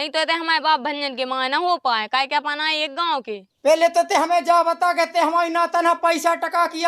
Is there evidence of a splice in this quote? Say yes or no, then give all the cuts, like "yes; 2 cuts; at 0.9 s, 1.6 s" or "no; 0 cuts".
yes; 1 cut; at 3.5 s